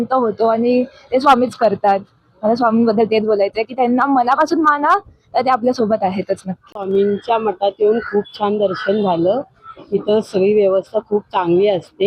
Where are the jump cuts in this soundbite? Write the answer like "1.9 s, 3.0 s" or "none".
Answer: none